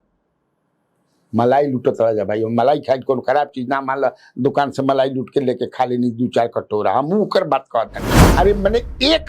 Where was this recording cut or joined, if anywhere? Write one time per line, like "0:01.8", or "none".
0:08.2